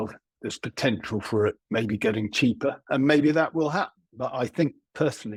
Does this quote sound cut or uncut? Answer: uncut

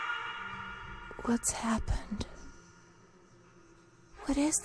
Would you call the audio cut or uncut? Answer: cut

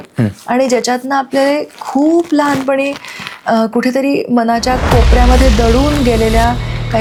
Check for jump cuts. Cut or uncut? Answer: uncut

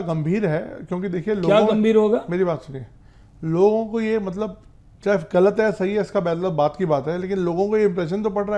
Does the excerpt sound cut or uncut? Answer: uncut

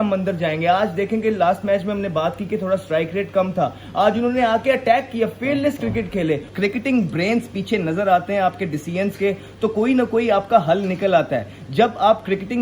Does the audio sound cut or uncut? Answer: cut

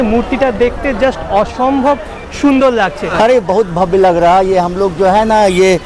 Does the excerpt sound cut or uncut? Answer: cut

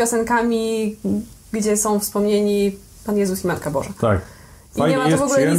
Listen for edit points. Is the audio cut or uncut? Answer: uncut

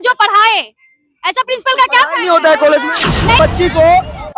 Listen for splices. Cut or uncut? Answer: cut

